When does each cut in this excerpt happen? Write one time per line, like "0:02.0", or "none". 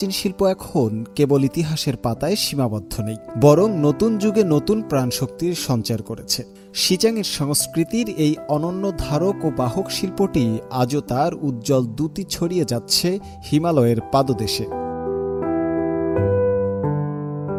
none